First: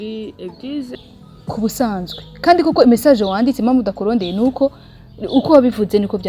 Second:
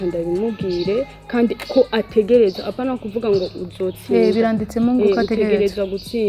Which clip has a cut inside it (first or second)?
first